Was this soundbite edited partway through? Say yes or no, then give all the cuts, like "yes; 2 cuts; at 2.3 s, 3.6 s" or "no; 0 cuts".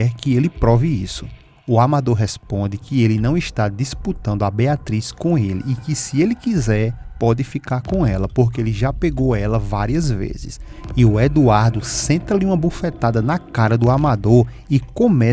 yes; 1 cut; at 10.7 s